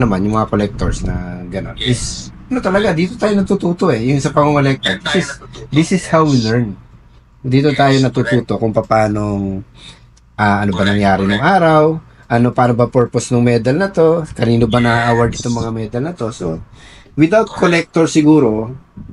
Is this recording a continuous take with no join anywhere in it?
yes; 0 cuts

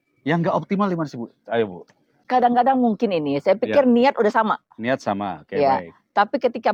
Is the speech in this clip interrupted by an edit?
no; 0 cuts

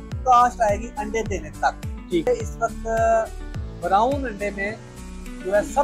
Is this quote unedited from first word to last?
no; 1 cut; at 2.3 s

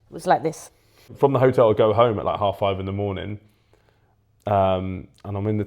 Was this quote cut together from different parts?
yes; 1 cut; at 1.0 s

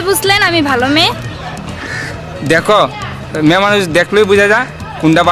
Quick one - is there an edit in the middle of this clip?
no; 0 cuts

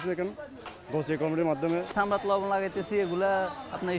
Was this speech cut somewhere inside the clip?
yes; 1 cut; at 1.9 s

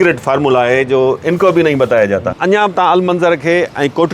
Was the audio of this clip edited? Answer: yes; 1 cut; at 2.4 s

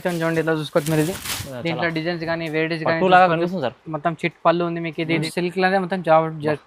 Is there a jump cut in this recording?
yes; 1 cut; at 5.3 s

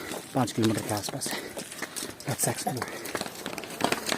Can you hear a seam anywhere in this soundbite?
yes; 1 cut; at 3.0 s

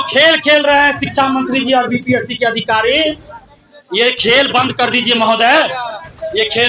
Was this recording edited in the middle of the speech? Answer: no; 0 cuts

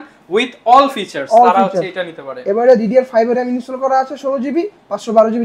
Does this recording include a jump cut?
no; 0 cuts

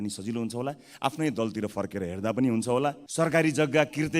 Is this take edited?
yes; 1 cut; at 3.0 s

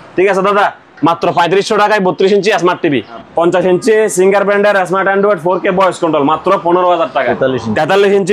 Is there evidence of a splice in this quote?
yes; 2 cuts; at 3.2 s, 7.2 s

